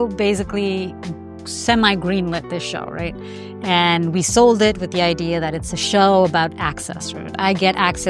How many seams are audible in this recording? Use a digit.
0